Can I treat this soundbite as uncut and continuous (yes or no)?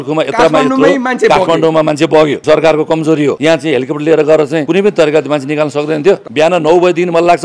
no